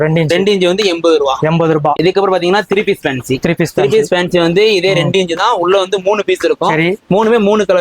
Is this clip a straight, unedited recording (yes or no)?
no